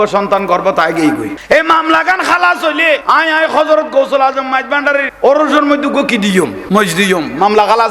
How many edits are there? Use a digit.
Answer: 4